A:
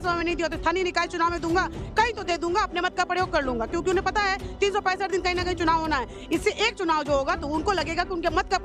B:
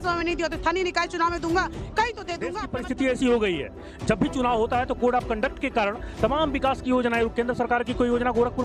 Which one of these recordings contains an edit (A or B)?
B